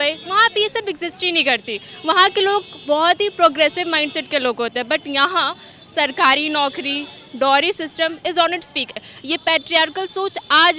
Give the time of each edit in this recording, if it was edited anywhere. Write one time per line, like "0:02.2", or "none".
0:08.9